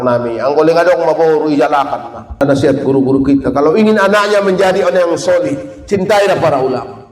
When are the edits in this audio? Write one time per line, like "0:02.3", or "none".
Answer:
0:02.4